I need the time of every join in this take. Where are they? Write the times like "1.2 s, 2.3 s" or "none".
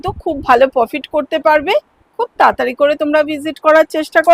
none

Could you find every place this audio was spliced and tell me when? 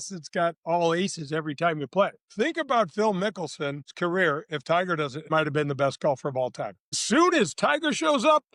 2.2 s, 3.9 s, 5.3 s, 7.0 s

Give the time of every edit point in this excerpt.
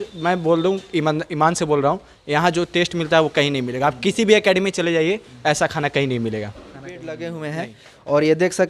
7.0 s

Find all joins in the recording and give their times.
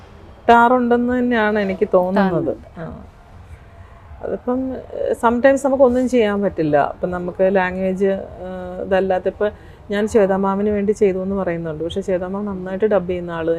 none

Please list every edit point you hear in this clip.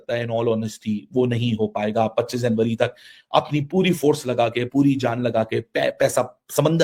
none

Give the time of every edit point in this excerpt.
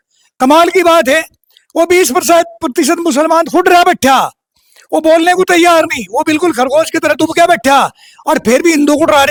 none

